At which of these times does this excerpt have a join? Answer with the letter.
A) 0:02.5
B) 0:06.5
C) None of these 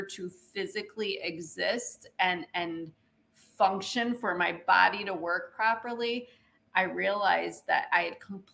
C